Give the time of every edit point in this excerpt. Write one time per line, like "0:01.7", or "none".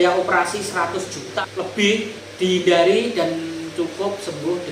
0:01.3
0:02.2